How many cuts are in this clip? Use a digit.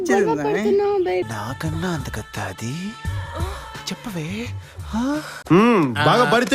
1